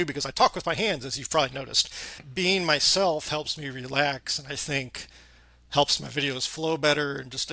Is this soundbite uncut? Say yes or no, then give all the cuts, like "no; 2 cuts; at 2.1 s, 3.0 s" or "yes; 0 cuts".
yes; 0 cuts